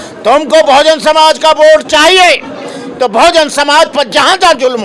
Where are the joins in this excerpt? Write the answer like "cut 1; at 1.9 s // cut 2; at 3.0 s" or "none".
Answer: none